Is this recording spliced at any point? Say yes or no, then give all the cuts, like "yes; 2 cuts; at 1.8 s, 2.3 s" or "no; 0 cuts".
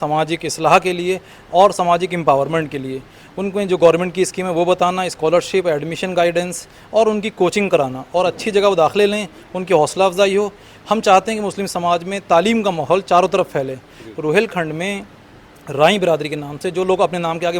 no; 0 cuts